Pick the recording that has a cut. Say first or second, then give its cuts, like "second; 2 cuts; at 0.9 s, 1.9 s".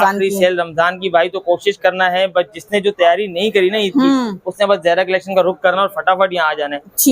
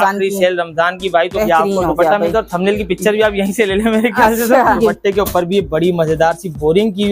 second; 2 cuts; at 1.3 s, 4.8 s